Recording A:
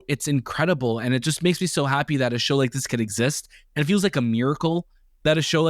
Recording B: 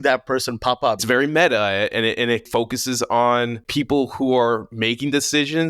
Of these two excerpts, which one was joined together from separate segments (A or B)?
B